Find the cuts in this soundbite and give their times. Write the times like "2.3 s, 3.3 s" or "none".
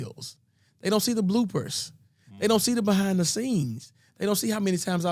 none